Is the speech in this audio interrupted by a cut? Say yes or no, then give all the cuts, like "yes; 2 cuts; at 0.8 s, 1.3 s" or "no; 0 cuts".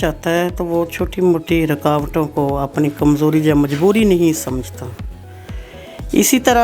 no; 0 cuts